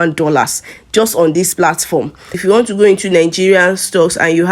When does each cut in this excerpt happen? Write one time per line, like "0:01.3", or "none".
0:02.3